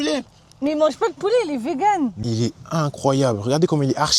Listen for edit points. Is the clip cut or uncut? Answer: cut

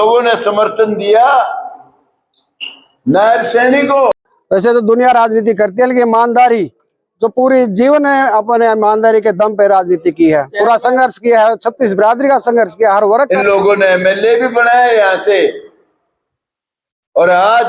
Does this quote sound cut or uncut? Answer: cut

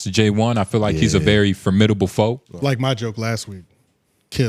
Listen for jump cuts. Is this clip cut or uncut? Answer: cut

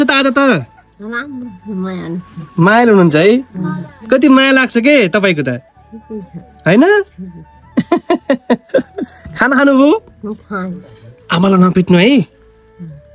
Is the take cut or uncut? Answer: uncut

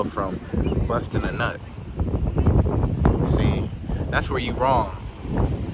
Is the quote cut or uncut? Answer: uncut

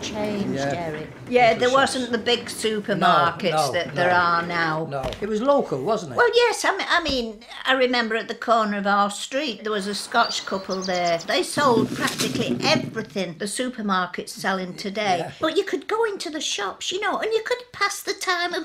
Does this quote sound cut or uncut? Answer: cut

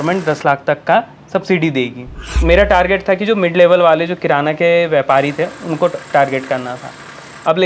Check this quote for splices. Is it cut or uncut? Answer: cut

